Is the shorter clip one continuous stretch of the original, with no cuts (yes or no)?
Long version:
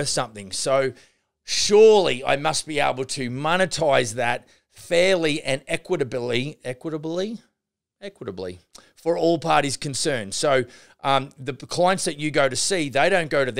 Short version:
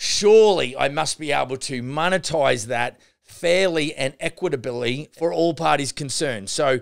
no